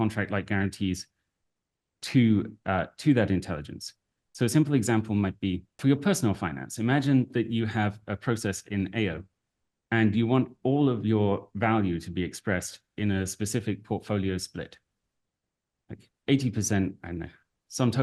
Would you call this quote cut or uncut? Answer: cut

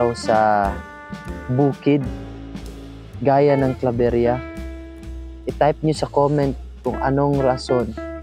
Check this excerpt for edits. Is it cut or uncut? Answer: uncut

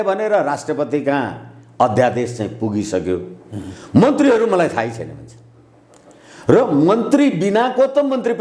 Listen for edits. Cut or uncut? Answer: uncut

